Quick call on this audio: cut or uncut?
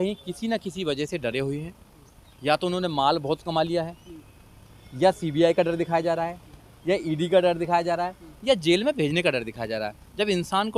uncut